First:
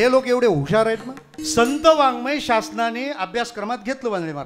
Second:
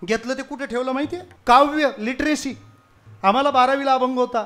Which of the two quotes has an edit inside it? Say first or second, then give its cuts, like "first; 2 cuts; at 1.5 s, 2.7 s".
second; 1 cut; at 1.3 s